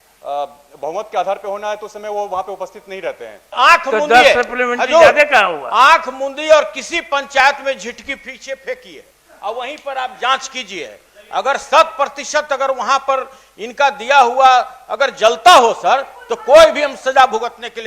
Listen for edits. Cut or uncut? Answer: cut